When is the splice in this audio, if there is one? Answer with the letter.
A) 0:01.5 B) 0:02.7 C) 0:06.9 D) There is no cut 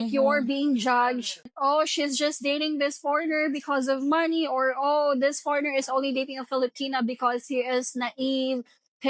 A